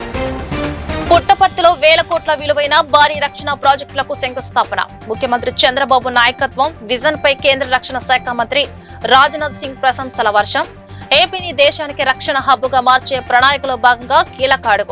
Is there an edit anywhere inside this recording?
yes; 1 cut; at 1.0 s

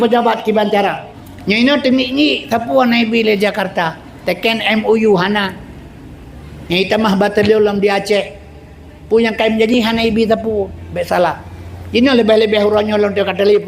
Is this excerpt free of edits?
no; 1 cut; at 1.1 s

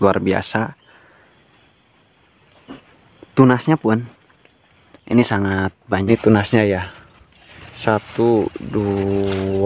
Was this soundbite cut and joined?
yes; 1 cut; at 6.1 s

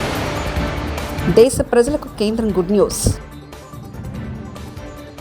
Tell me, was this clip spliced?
no; 0 cuts

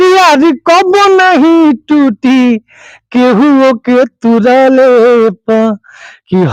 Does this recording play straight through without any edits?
yes; 0 cuts

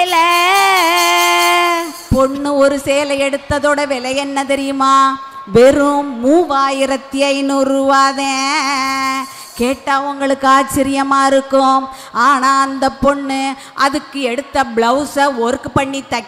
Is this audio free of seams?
yes; 0 cuts

